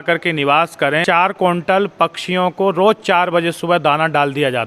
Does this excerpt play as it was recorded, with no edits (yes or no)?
no